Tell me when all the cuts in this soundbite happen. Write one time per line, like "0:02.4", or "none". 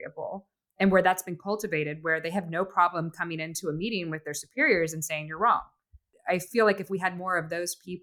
0:06.1

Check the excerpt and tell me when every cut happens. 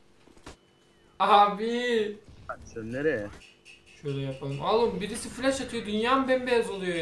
0:02.5

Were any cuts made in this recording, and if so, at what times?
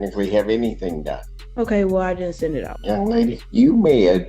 0:03.1

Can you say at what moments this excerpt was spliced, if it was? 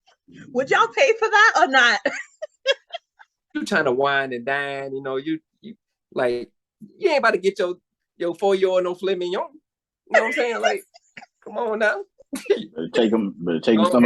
0:03.6

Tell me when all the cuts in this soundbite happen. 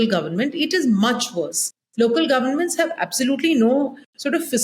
none

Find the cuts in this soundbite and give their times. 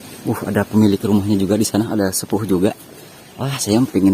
none

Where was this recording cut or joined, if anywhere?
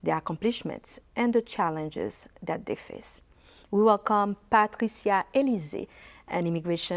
0:04.3

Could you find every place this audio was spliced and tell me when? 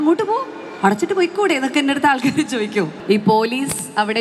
0:03.0

